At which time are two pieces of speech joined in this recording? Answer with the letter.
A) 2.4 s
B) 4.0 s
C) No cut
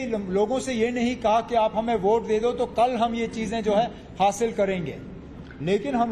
B